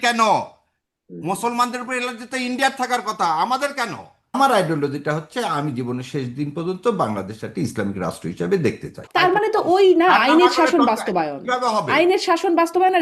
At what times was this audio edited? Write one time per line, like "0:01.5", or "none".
0:04.4
0:09.0